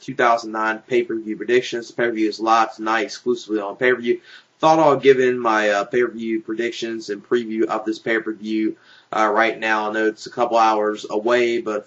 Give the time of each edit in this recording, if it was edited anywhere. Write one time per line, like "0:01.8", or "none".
none